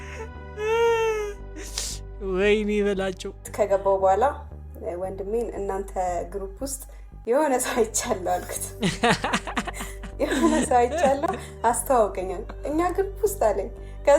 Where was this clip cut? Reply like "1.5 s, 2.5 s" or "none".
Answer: 3.4 s